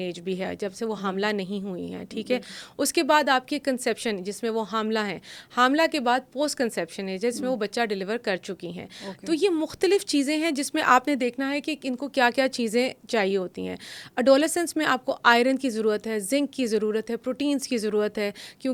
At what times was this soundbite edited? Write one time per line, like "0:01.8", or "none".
none